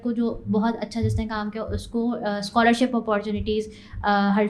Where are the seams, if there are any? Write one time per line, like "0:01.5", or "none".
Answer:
none